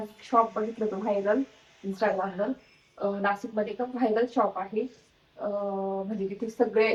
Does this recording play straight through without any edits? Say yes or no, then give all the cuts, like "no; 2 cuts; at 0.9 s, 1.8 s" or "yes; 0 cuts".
yes; 0 cuts